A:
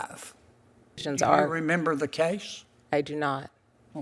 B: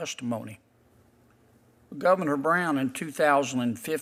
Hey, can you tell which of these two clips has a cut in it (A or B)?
A